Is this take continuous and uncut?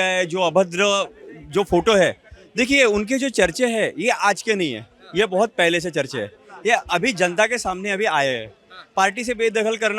yes; 0 cuts

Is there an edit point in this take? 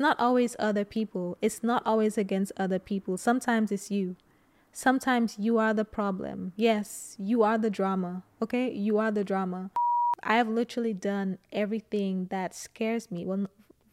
yes; 1 cut; at 9.8 s

